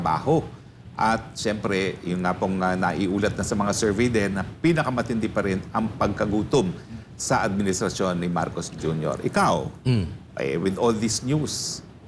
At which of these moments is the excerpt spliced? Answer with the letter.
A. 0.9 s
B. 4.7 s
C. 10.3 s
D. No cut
D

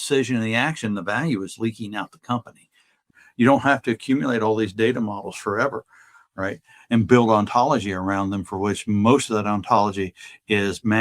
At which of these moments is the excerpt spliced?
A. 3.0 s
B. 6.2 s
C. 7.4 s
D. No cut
A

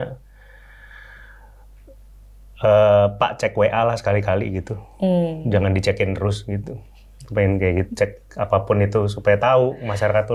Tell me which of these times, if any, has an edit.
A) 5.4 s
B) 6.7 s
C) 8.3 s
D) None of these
D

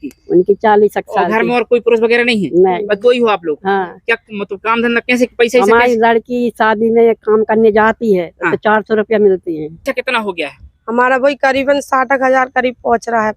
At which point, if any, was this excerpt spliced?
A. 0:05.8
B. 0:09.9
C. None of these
B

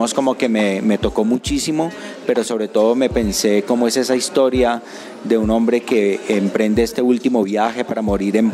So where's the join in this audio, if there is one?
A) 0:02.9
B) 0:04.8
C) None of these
C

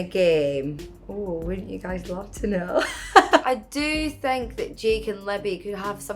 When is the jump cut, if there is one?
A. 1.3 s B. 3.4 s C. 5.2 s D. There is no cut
B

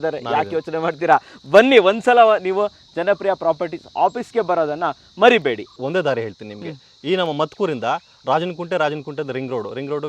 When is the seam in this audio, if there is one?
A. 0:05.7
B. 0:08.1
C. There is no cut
A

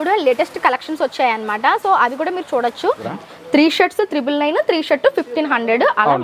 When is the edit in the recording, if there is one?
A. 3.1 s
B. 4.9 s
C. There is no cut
A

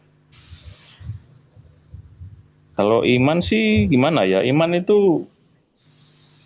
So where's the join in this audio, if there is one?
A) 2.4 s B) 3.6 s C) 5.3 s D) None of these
D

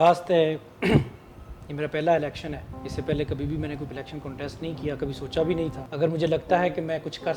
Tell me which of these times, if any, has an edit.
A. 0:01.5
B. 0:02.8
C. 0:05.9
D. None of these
C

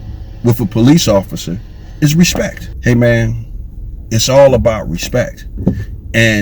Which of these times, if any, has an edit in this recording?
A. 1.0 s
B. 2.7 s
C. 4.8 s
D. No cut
B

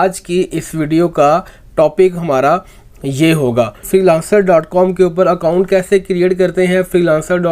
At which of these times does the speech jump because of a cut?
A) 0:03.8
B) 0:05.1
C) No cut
A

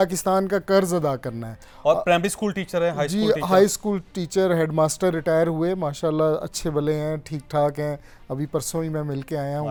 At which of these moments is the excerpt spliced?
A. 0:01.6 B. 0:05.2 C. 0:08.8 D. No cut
D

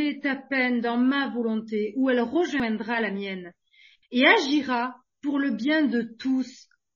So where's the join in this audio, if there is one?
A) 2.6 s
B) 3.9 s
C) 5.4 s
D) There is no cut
A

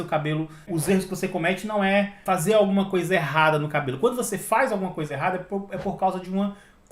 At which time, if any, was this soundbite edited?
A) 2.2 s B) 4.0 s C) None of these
A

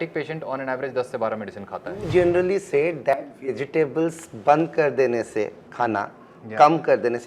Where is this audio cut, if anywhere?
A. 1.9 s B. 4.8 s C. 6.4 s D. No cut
A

